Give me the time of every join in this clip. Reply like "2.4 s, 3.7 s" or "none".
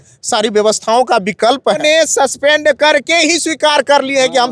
1.8 s